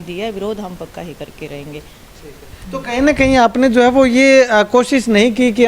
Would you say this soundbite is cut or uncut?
uncut